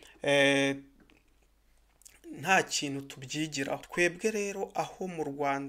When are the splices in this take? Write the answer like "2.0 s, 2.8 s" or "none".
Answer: 3.9 s